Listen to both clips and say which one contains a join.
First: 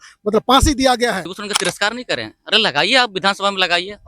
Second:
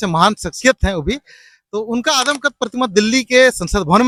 first; 1 cut; at 1.2 s

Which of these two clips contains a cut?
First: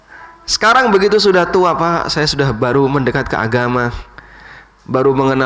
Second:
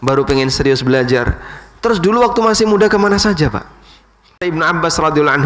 second; 1 cut; at 4.4 s

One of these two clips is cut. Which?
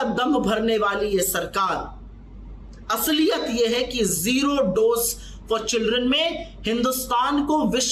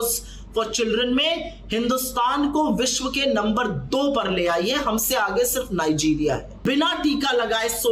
second; 1 cut; at 6.6 s

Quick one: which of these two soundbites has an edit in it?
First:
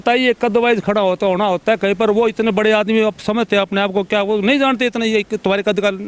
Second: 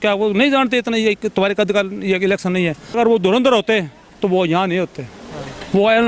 second; 1 cut; at 2.9 s

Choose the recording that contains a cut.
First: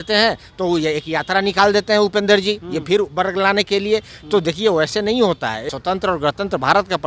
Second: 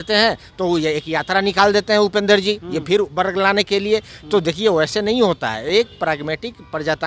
first; 1 cut; at 5.6 s

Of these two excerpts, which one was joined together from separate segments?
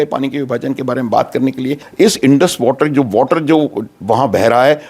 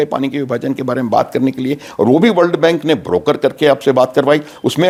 first; 1 cut; at 1.9 s

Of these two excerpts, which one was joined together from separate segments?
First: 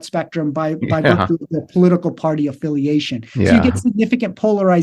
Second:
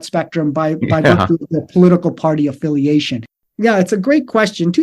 second; 1 cut; at 3.2 s

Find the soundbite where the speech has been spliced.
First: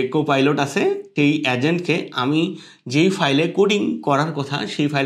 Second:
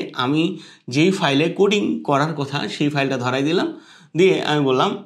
first; 1 cut; at 1.1 s

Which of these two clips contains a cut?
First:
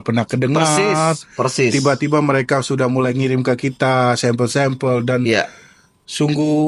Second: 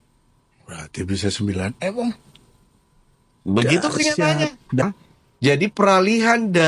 second; 1 cut; at 4.8 s

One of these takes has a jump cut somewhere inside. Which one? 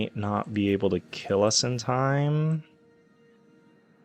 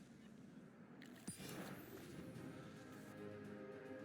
second; 1 cut; at 2.6 s

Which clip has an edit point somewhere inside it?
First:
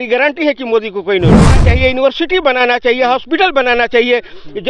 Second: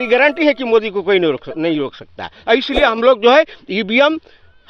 first; 1 cut; at 1.6 s

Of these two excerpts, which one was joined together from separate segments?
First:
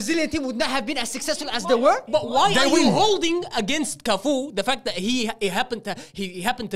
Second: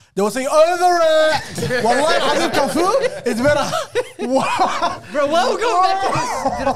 first; 1 cut; at 2.0 s

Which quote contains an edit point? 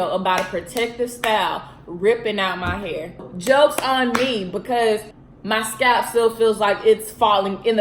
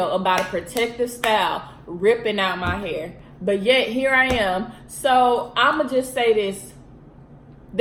first; 2 cuts; at 3.3 s, 5.2 s

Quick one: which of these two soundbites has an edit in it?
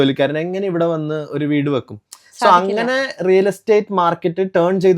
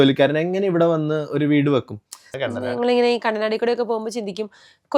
second; 1 cut; at 2.3 s

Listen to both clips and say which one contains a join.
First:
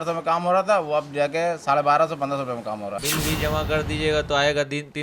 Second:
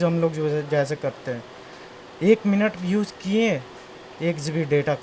first; 1 cut; at 3.0 s

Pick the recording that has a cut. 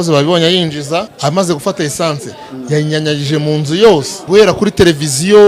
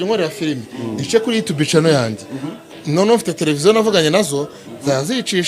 first; 2 cuts; at 1.1 s, 3.9 s

